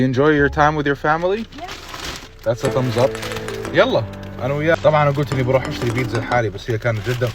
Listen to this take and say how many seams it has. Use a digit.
1